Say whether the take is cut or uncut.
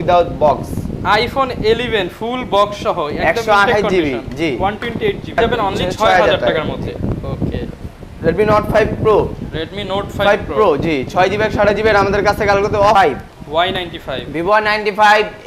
cut